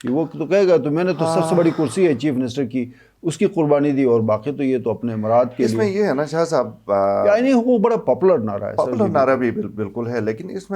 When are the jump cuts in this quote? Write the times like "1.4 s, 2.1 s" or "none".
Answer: none